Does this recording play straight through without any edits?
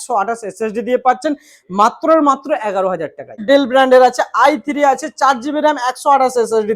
no; 1 cut; at 3.4 s

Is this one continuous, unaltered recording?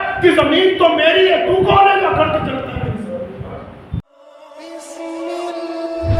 no; 1 cut; at 4.0 s

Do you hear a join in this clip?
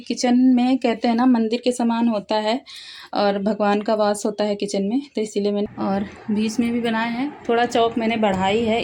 yes; 1 cut; at 5.7 s

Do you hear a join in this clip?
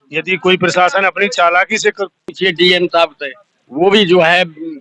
yes; 1 cut; at 2.3 s

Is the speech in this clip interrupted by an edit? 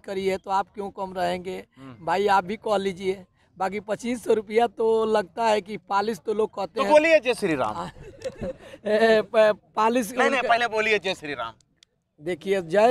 no; 0 cuts

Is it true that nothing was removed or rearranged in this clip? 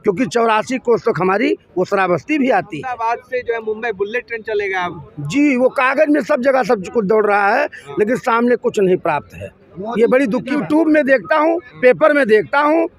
no; 2 cuts; at 2.9 s, 10.5 s

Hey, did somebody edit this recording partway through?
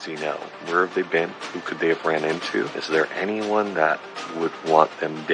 yes; 1 cut; at 2.8 s

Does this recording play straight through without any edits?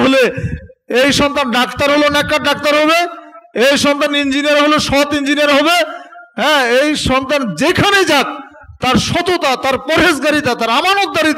yes; 0 cuts

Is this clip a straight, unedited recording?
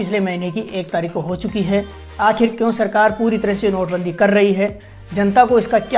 no; 1 cut; at 2.0 s

